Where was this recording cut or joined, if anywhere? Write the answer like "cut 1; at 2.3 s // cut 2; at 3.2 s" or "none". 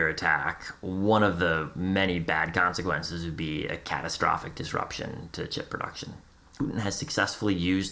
cut 1; at 6.4 s